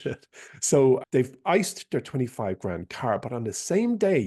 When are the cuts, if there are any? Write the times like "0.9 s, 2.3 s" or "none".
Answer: 1.0 s